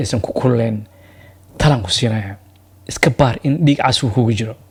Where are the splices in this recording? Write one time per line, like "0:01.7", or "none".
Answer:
none